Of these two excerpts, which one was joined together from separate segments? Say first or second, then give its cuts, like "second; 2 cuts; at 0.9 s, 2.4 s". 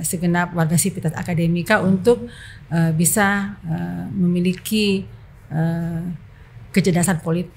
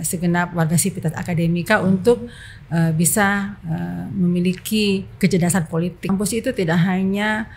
second; 2 cuts; at 5.1 s, 6.1 s